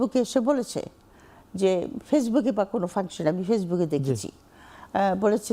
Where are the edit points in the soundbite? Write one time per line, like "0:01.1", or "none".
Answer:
none